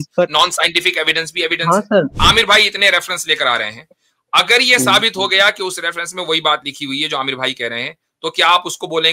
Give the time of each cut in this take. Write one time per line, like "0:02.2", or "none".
0:02.1